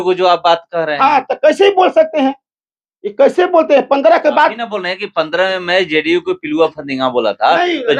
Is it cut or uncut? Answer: uncut